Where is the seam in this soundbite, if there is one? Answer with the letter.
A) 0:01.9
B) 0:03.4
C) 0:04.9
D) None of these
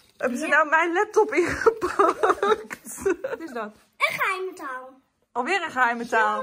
B